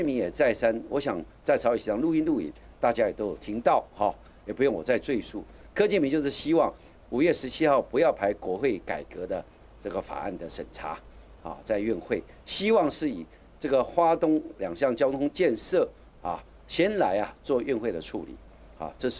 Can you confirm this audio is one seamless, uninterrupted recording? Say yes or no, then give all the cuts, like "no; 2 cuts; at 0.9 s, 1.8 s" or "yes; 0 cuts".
yes; 0 cuts